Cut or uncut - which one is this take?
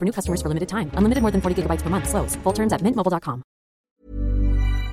cut